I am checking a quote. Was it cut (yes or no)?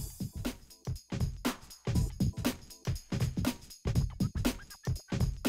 no